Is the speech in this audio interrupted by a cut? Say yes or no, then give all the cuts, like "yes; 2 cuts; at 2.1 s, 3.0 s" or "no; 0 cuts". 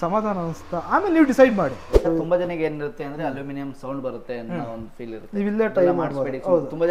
yes; 1 cut; at 1.9 s